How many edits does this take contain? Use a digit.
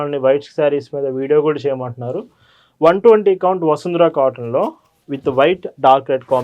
0